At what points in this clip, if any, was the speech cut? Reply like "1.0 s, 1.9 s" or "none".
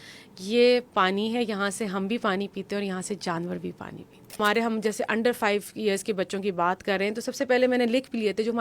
4.4 s

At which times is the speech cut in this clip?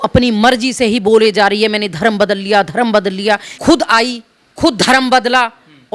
3.5 s

